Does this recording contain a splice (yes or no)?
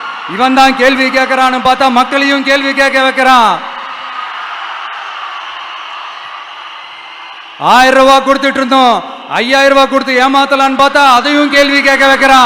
no